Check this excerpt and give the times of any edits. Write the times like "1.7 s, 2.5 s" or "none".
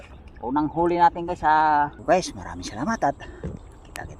2.0 s